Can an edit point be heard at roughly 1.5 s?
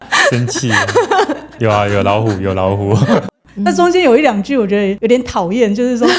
yes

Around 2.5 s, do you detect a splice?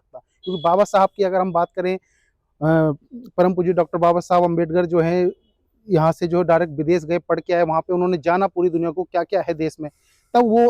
no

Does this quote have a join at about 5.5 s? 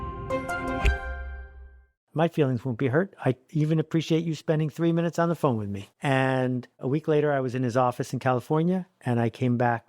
no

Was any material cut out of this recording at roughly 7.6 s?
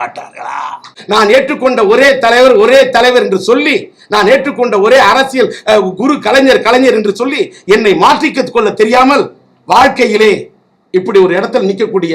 no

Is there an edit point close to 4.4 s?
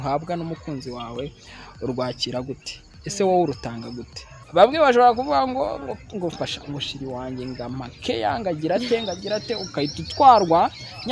yes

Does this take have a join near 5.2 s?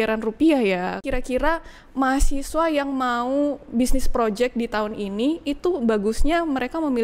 no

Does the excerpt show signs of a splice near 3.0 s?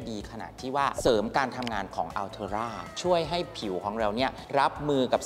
yes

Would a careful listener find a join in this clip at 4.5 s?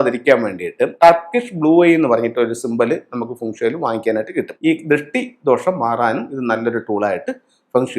yes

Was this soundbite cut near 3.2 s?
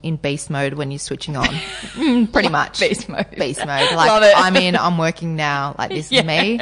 no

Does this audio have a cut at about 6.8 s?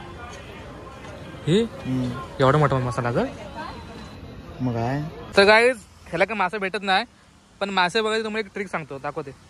no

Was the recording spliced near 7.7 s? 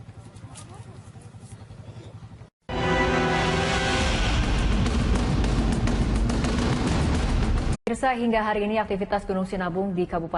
no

